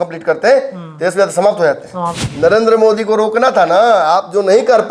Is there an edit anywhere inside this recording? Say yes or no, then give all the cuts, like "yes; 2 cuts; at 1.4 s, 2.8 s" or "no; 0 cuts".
yes; 1 cut; at 2.2 s